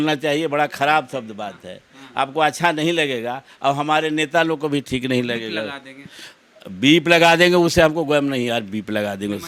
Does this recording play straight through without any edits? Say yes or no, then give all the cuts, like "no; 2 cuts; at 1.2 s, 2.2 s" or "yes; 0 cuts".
yes; 0 cuts